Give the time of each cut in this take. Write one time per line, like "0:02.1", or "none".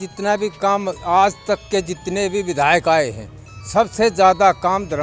none